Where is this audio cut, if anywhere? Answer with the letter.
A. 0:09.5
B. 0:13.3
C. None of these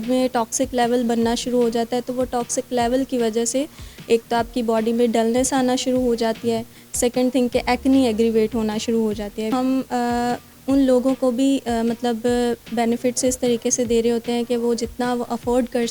A